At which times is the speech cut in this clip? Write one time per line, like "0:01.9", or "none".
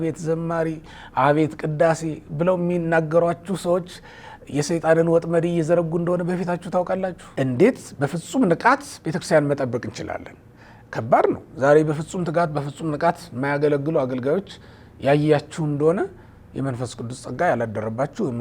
0:07.2